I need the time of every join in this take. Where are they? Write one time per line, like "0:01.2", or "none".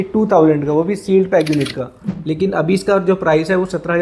0:02.1